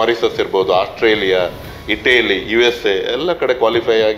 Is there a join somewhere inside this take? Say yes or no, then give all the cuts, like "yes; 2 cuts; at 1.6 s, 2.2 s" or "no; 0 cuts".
no; 0 cuts